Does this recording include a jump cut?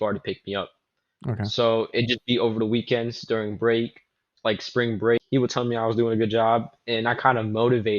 yes; 1 cut; at 5.2 s

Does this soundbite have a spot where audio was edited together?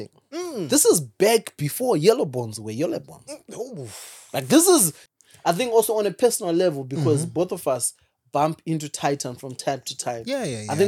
yes; 1 cut; at 5.0 s

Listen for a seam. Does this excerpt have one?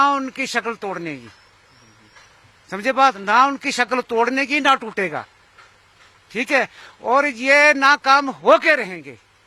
no; 0 cuts

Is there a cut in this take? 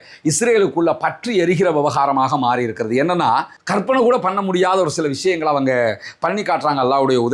no; 0 cuts

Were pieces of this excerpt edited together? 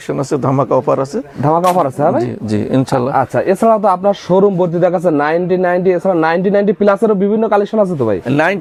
no; 0 cuts

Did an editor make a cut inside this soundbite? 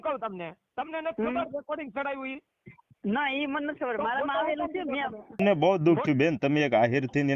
yes; 1 cut; at 5.4 s

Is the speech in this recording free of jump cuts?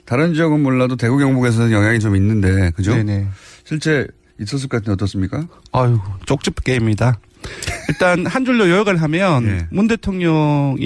yes; 0 cuts

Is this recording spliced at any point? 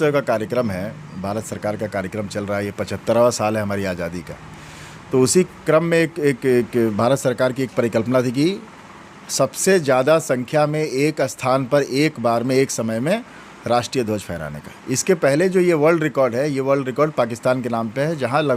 no; 0 cuts

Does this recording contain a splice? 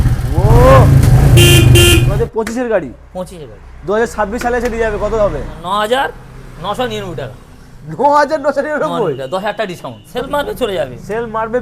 yes; 3 cuts; at 2.1 s, 5.6 s, 10.1 s

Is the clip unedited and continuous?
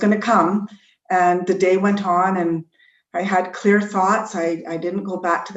yes; 0 cuts

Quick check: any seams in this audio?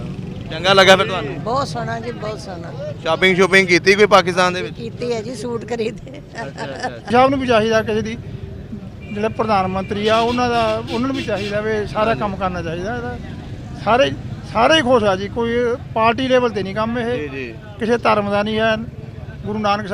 yes; 1 cut; at 7.1 s

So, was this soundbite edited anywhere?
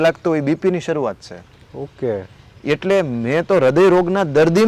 no; 0 cuts

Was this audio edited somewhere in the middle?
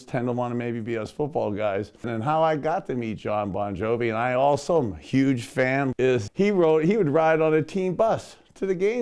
yes; 2 cuts; at 2.1 s, 6.0 s

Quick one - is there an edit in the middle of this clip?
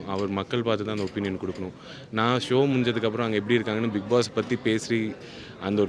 no; 0 cuts

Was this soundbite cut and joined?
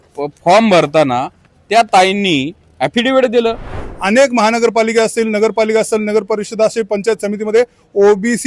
yes; 1 cut; at 3.8 s

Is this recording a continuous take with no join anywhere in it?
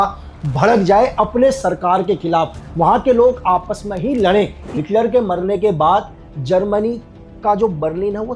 no; 1 cut; at 4.8 s

